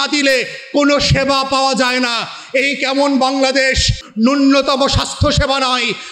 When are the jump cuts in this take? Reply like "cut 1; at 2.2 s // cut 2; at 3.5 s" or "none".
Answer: cut 1; at 4.0 s

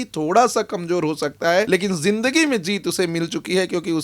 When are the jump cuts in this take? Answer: cut 1; at 1.7 s

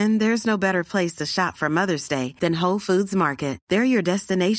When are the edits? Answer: none

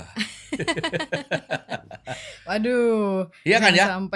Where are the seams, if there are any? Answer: none

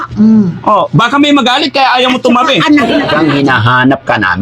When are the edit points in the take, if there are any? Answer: cut 1; at 3.1 s

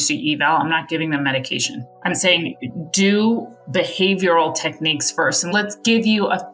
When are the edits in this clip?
cut 1; at 2.2 s // cut 2; at 5.5 s

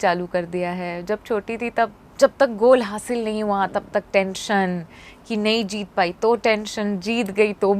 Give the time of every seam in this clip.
cut 1; at 2.0 s

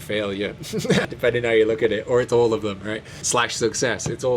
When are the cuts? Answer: cut 1; at 1.1 s // cut 2; at 3.2 s

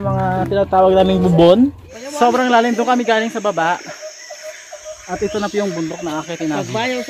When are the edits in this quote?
cut 1; at 1.9 s

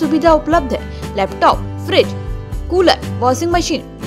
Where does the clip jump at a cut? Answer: none

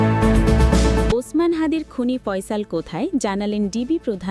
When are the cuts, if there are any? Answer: cut 1; at 1.1 s

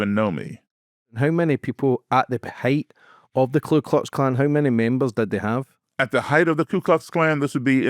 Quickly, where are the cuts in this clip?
cut 1; at 1.1 s

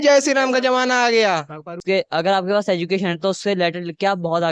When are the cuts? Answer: cut 1; at 1.8 s

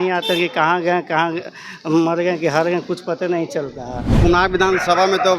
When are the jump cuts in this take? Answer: cut 1; at 4.1 s

